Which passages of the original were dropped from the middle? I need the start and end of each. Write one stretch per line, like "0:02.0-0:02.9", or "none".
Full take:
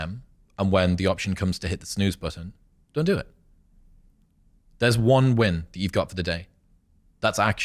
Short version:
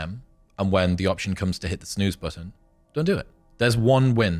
0:03.4-0:04.6